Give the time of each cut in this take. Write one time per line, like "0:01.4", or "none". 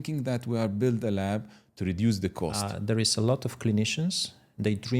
0:02.7